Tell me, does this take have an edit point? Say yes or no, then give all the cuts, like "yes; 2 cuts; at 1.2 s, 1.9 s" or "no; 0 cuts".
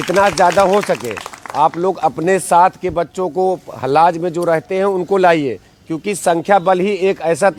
no; 0 cuts